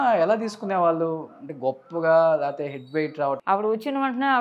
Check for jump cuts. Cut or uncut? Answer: cut